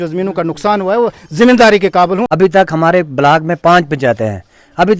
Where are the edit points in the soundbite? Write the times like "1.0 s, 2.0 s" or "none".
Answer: 2.3 s